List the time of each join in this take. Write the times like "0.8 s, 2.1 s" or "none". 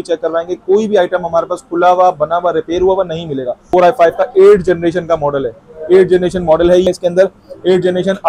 3.7 s, 6.9 s